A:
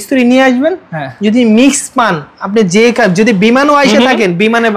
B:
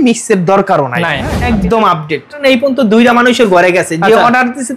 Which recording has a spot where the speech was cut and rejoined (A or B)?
B